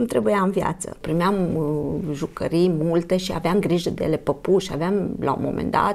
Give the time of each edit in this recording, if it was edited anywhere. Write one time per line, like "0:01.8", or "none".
0:01.0